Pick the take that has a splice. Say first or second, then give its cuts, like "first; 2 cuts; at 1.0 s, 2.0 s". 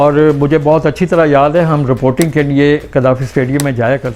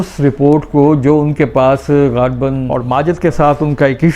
second; 1 cut; at 2.6 s